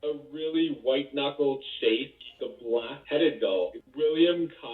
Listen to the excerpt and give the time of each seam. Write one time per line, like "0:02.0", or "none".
0:02.1
0:03.8